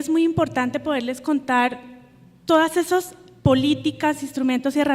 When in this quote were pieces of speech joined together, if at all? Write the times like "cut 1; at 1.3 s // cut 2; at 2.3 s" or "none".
cut 1; at 2.3 s